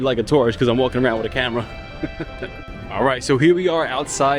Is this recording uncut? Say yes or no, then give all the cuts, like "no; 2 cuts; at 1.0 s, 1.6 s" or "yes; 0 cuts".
yes; 0 cuts